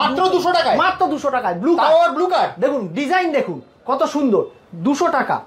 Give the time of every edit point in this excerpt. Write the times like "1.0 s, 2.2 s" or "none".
none